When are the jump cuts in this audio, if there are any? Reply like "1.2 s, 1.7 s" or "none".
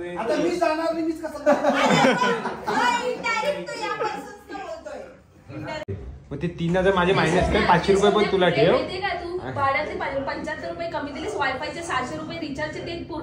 5.9 s